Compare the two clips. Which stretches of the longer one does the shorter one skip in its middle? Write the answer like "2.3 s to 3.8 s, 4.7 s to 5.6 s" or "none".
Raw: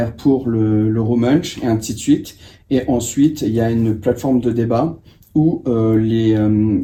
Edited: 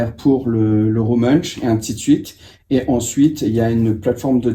none